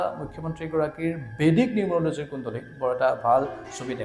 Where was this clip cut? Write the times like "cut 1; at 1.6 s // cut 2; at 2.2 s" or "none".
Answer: none